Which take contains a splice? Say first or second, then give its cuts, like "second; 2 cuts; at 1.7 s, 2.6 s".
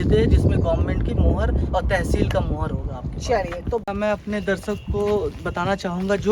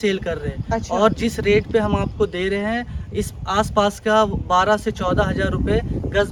first; 1 cut; at 3.9 s